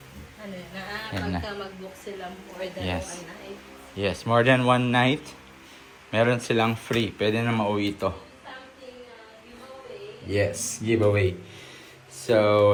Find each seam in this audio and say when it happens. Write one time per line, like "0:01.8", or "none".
none